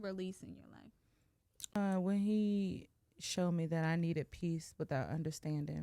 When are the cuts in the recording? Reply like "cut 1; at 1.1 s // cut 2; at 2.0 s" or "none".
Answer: cut 1; at 1.7 s